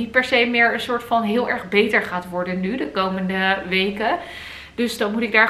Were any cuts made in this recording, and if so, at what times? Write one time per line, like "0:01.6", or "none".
none